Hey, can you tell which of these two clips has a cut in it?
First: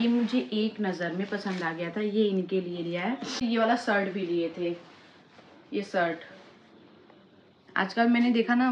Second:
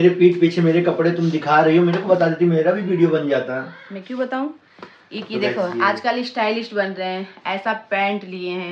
first; 1 cut; at 3.4 s

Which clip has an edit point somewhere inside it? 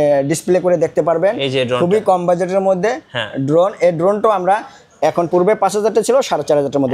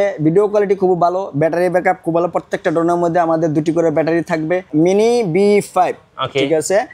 second; 1 cut; at 4.7 s

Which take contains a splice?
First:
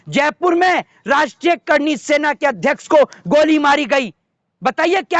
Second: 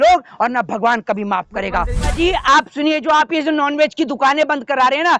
second; 1 cut; at 2.1 s

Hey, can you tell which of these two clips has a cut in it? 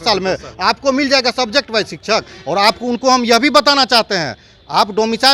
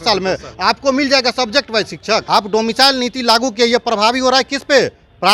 second; 1 cut; at 2.2 s

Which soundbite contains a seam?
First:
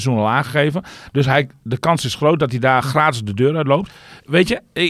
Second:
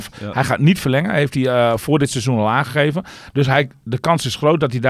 first; 1 cut; at 4.0 s

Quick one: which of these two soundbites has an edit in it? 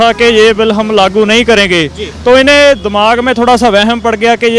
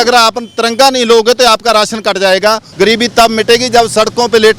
second; 1 cut; at 2.7 s

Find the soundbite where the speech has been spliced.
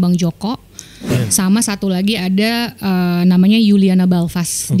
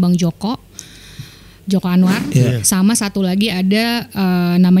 first; 1 cut; at 1.1 s

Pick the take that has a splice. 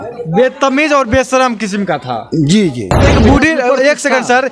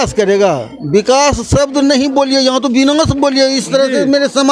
first; 1 cut; at 3.1 s

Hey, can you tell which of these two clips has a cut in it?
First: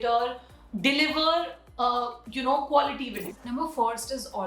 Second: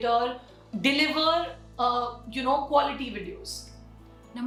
first; 1 cut; at 3.3 s

